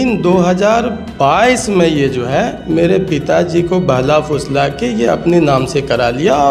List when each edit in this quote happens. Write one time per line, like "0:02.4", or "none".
none